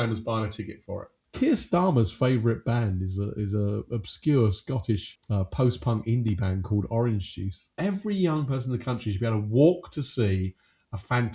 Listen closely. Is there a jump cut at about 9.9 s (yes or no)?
no